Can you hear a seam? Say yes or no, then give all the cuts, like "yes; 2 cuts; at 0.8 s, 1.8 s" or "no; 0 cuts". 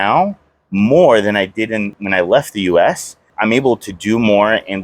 yes; 2 cuts; at 1.9 s, 3.3 s